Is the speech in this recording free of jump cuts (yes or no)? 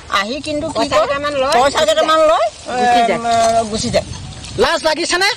yes